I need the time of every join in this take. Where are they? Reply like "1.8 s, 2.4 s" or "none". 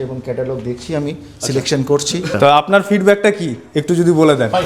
2.3 s